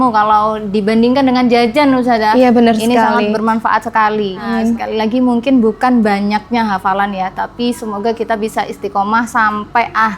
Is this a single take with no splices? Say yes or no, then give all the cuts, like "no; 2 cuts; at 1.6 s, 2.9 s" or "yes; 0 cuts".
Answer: no; 1 cut; at 4.5 s